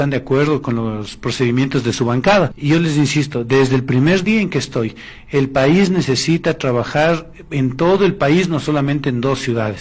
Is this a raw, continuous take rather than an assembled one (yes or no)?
no